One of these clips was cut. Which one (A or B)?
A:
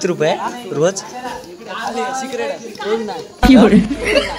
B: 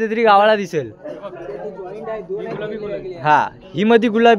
A